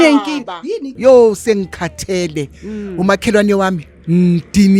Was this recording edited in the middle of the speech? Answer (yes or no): yes